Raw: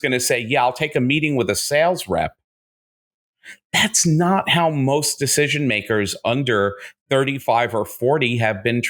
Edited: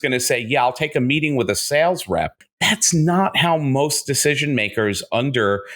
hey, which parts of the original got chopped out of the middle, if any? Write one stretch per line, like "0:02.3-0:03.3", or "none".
0:02.5-0:03.6